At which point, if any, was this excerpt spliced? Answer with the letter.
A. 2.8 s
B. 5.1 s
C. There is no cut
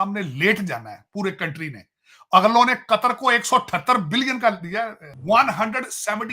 B